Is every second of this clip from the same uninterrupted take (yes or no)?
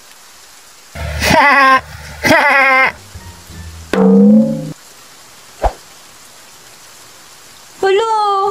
no